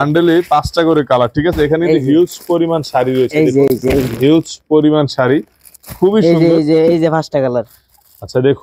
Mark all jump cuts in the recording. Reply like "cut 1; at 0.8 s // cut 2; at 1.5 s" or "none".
none